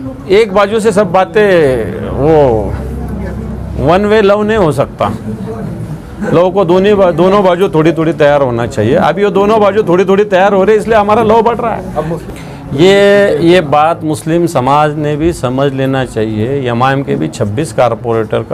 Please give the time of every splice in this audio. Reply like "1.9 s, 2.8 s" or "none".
12.2 s

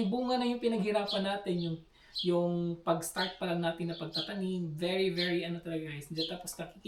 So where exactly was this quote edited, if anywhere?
none

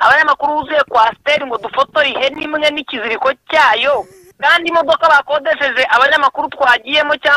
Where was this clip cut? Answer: 4.2 s

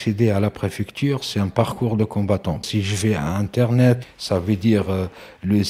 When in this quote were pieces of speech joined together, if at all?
none

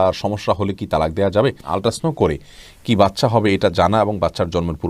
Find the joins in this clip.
1.7 s

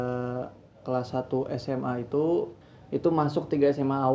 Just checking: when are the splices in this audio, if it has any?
2.6 s

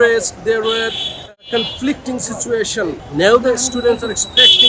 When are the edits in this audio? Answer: 3.0 s

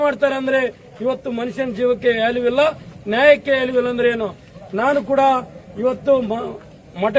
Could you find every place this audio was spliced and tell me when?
none

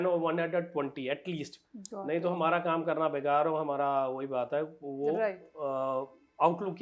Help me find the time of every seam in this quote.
none

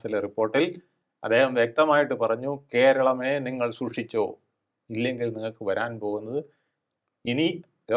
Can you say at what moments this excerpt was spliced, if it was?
none

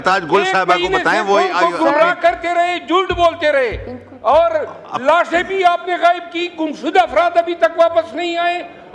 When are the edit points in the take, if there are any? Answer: none

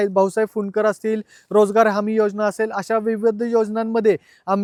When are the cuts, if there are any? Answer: none

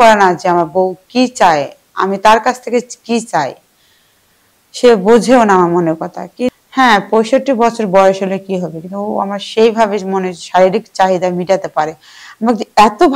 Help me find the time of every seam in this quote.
6.5 s

